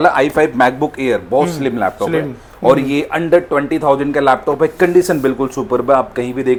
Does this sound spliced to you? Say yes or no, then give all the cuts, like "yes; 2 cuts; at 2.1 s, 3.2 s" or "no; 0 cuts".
no; 0 cuts